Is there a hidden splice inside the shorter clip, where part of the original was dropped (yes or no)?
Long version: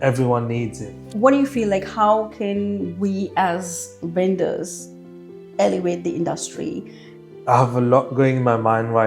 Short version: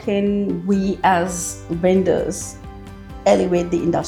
no